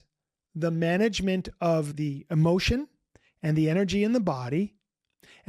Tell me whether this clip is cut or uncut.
cut